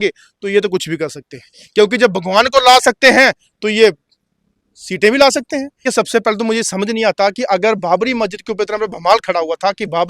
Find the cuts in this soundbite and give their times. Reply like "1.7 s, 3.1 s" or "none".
5.8 s